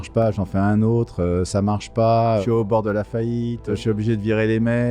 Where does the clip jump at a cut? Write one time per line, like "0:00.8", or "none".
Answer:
0:02.4
0:03.8